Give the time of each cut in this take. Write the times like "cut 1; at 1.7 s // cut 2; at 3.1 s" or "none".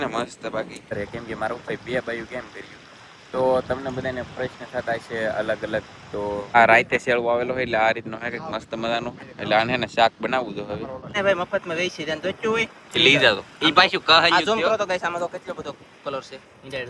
cut 1; at 1.0 s // cut 2; at 6.6 s // cut 3; at 11.1 s